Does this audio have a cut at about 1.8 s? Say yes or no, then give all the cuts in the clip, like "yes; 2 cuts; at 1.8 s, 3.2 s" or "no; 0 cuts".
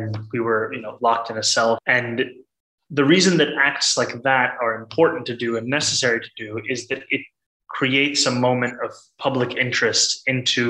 yes; 1 cut; at 1.8 s